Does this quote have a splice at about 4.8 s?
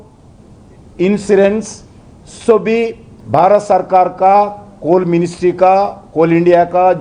no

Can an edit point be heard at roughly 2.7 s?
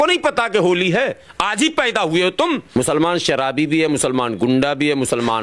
yes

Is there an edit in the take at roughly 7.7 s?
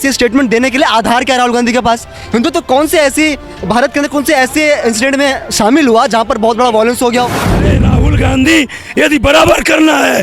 yes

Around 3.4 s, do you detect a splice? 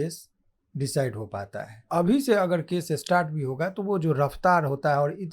no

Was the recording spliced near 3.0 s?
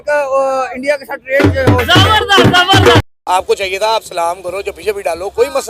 yes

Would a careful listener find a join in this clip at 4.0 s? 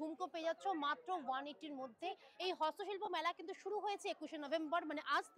no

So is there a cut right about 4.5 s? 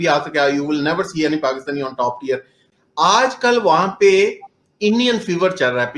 no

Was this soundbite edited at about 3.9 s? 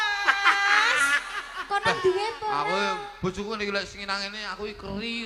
no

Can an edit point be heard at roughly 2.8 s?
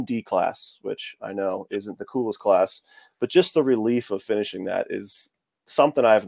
no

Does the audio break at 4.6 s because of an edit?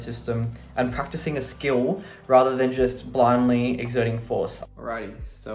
yes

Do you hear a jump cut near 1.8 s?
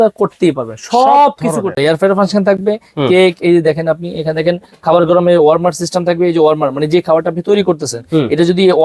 yes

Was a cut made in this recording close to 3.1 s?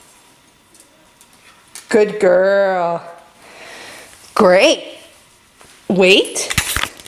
no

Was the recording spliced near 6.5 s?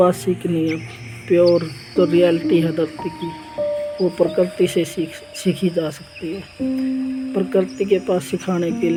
no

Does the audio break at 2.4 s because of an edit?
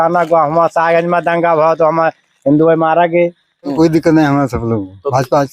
no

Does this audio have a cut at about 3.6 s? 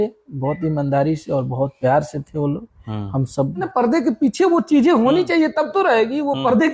yes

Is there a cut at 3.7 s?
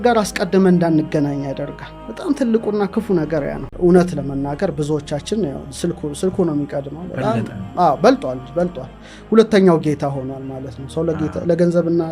yes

